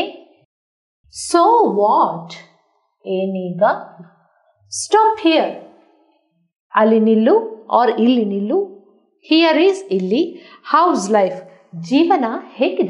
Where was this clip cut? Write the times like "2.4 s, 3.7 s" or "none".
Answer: none